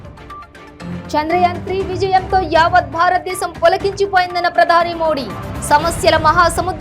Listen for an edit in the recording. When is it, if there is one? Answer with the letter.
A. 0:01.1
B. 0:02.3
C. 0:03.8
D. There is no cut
A